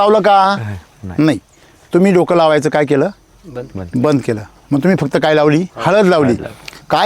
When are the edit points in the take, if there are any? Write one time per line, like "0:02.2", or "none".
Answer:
0:05.7